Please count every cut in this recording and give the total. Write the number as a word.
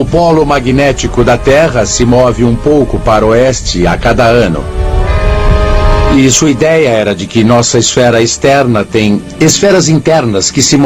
one